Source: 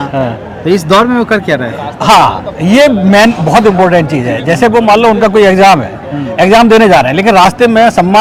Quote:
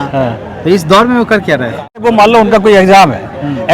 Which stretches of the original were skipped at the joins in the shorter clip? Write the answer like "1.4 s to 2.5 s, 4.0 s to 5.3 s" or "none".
2.0 s to 4.7 s

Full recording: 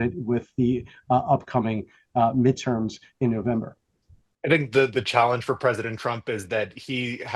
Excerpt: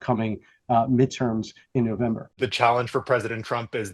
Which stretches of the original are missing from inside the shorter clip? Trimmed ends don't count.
3.8 s to 4.9 s

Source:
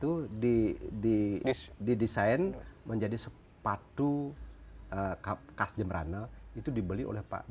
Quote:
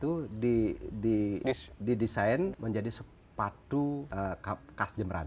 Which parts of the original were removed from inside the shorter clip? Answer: 2.6 s to 2.8 s, 4.3 s to 4.9 s

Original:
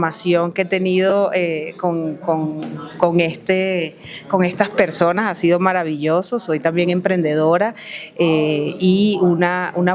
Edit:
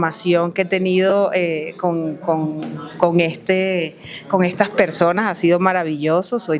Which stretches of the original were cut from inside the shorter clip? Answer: none

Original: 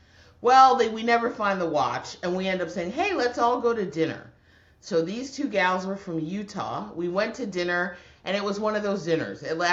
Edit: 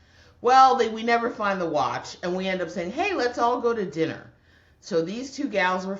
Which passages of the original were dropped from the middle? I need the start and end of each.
none

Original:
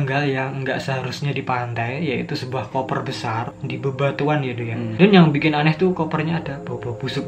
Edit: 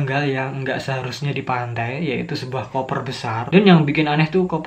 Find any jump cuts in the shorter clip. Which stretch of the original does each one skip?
3.5 s to 4.9 s

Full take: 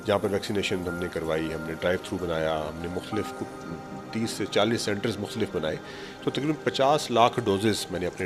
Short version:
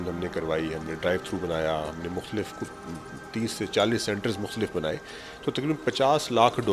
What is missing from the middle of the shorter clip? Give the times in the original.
none

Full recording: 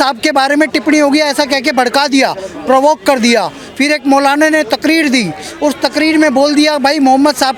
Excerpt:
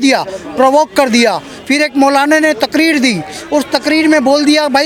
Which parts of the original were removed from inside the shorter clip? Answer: none

